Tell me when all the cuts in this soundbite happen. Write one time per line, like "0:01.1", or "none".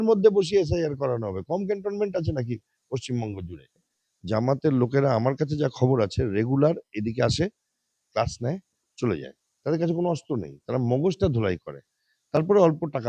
0:03.9